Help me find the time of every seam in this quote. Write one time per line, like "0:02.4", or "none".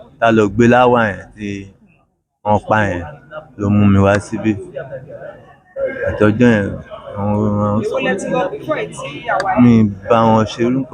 none